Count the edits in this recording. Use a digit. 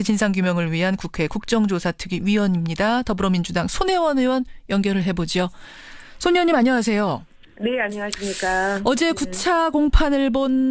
1